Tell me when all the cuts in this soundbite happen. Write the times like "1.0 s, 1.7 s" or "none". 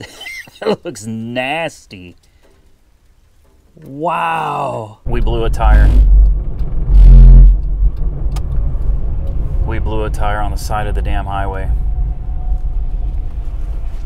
5.0 s